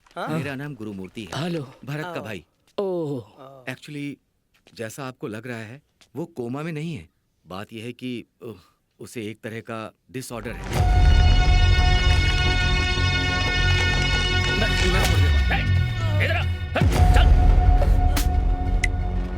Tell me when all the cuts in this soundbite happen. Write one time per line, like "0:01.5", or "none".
0:10.6
0:15.1